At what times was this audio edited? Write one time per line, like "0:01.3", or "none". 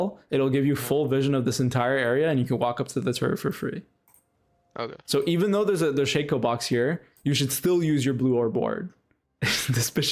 0:09.2